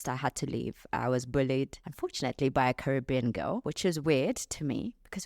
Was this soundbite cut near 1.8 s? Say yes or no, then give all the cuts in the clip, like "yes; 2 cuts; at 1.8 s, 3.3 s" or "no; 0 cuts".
yes; 2 cuts; at 1.8 s, 3.7 s